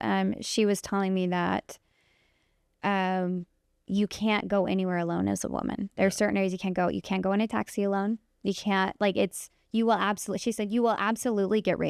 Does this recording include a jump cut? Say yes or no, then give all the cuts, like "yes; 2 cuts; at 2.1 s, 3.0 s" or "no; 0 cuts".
no; 0 cuts